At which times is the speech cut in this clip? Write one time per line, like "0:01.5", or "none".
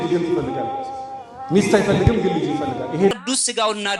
0:03.1

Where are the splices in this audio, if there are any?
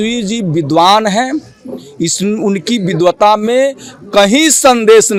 none

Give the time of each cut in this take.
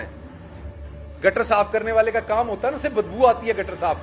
none

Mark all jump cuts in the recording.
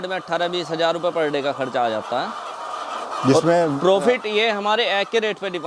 none

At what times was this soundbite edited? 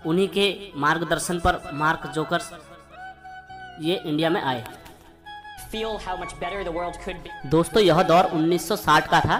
none

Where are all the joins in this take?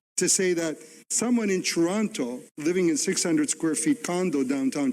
none

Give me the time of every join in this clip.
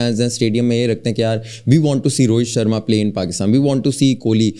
none

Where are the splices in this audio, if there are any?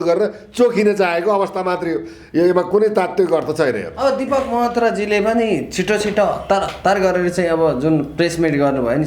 none

